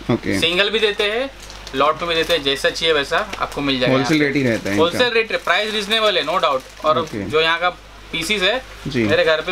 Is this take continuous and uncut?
yes; 0 cuts

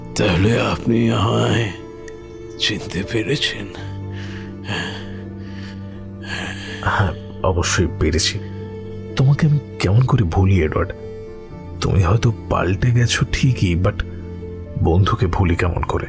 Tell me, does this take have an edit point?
yes; 1 cut; at 3.4 s

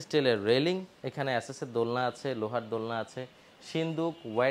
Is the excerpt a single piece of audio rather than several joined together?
no; 1 cut; at 1.0 s

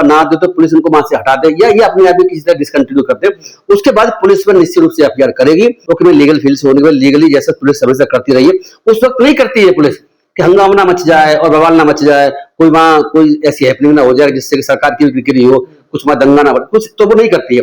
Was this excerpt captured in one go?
no; 1 cut; at 5.8 s

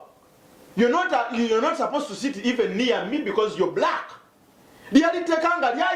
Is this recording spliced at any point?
no; 0 cuts

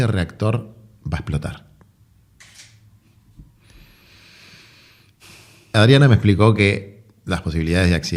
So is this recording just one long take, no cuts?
yes; 0 cuts

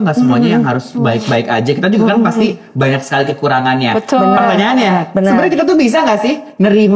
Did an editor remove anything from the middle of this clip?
no; 0 cuts

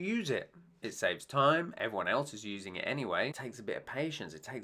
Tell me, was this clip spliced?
yes; 1 cut; at 3.3 s

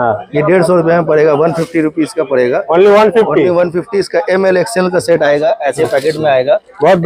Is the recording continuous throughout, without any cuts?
yes; 0 cuts

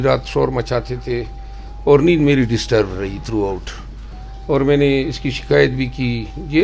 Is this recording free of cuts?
yes; 0 cuts

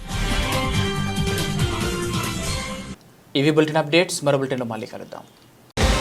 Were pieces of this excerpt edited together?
no; 0 cuts

